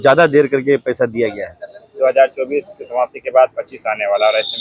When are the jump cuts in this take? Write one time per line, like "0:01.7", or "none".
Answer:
none